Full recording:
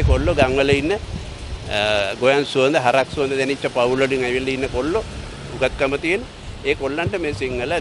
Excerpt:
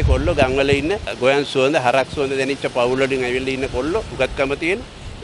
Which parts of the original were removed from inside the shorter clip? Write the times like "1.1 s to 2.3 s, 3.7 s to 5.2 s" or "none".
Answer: 1.1 s to 2.1 s, 5.1 s to 5.5 s